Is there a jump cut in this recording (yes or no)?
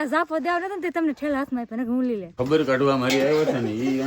yes